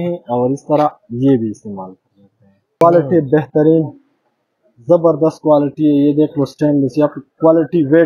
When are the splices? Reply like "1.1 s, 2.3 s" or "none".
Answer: 2.8 s